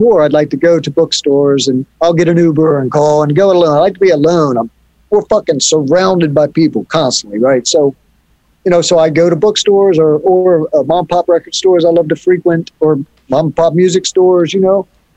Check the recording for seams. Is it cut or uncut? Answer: uncut